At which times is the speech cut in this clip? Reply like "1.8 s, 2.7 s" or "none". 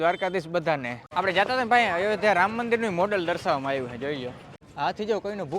1.1 s, 4.6 s